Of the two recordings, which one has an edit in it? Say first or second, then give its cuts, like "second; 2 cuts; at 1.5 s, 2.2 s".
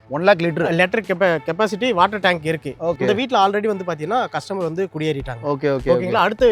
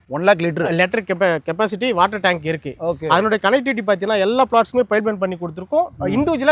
first; 1 cut; at 3.0 s